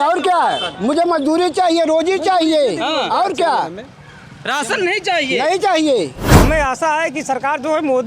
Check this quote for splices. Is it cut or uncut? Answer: cut